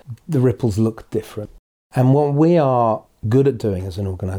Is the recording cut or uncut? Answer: cut